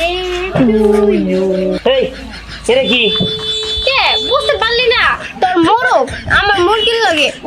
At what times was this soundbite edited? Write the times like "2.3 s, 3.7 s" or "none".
none

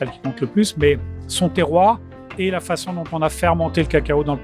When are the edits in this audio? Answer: none

